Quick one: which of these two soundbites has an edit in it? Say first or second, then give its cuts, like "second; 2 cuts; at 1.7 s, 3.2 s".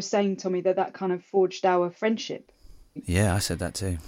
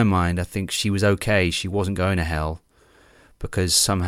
first; 1 cut; at 3.0 s